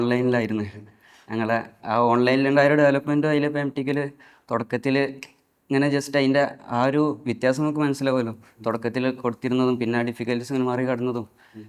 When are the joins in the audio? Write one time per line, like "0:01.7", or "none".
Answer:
none